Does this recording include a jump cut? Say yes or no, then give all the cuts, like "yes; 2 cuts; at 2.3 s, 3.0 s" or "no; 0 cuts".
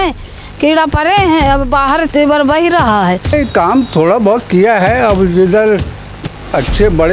yes; 1 cut; at 3.3 s